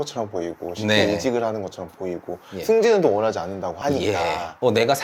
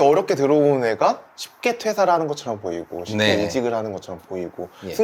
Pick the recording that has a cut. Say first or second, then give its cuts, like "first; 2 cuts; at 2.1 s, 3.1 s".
first; 1 cut; at 4.0 s